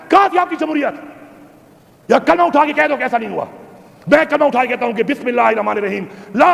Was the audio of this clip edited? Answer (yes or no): no